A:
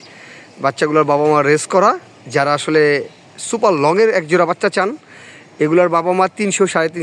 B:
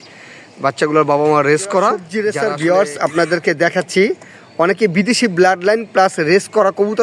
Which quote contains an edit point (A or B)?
B